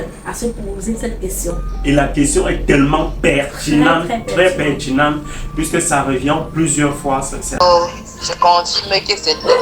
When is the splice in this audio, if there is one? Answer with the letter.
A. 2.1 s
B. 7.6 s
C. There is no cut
B